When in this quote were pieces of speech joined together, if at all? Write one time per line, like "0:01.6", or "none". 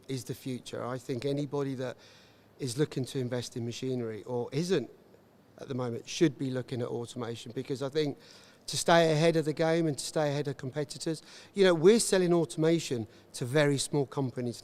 none